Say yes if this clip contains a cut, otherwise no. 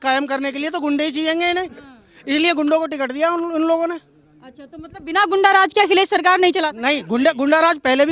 no